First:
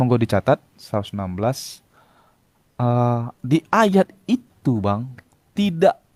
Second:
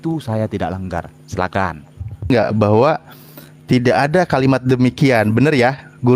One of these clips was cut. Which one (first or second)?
second